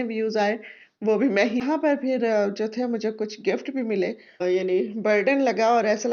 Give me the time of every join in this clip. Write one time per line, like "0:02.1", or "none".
0:01.6
0:04.4

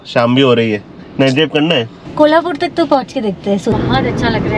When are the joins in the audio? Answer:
0:02.0
0:03.7

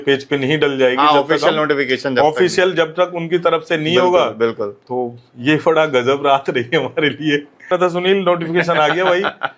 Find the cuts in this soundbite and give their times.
0:07.7

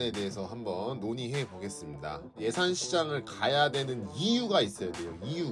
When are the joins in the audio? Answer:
0:02.4

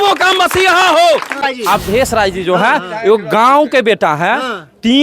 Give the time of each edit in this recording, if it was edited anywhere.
0:01.5

